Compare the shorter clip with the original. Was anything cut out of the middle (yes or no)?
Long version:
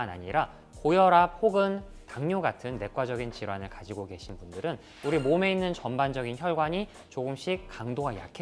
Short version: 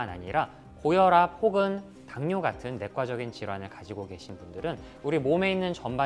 no